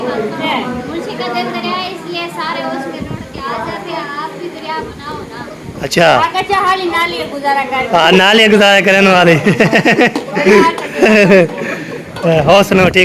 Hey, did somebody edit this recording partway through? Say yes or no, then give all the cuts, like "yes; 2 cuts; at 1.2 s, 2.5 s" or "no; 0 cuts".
no; 0 cuts